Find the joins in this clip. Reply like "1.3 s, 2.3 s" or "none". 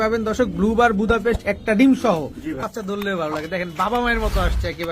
2.6 s